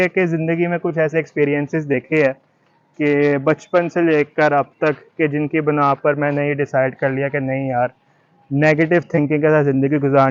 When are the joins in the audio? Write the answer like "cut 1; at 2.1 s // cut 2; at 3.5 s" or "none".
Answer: none